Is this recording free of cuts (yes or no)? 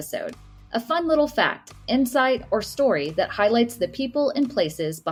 yes